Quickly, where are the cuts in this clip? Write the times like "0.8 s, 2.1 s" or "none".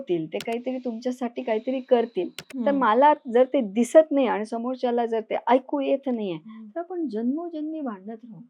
none